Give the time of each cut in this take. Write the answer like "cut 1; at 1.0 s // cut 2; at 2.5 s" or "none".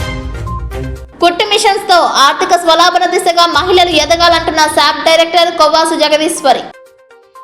cut 1; at 0.9 s